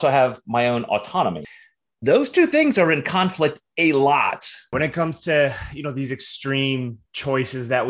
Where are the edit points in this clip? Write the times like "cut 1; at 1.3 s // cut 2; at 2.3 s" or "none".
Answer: cut 1; at 1.5 s // cut 2; at 4.7 s